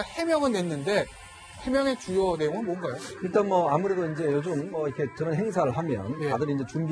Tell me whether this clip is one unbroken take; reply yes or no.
yes